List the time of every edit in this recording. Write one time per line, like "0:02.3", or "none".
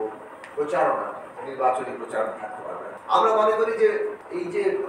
0:02.8